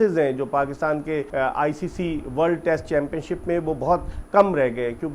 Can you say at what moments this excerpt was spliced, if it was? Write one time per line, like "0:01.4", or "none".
0:01.3